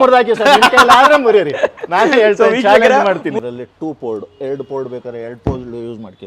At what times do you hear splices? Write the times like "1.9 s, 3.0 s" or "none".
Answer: 3.3 s